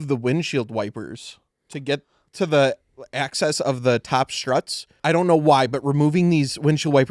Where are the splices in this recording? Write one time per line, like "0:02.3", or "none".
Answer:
0:04.8

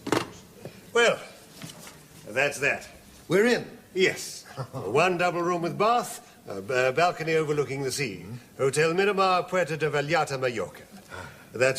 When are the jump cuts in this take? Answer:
0:07.9

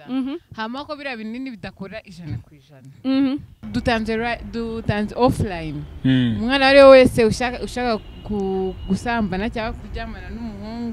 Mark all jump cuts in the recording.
0:03.5

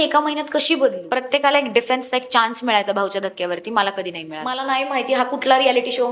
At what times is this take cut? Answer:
0:01.1
0:04.7

